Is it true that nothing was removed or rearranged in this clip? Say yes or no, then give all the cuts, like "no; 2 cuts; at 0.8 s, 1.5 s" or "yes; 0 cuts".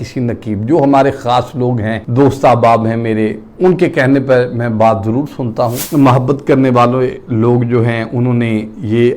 no; 1 cut; at 5.8 s